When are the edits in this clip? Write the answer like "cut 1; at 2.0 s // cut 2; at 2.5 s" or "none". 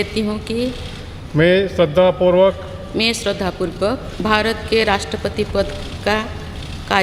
cut 1; at 4.1 s